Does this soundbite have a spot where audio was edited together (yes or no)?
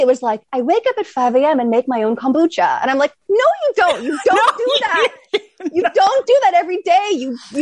no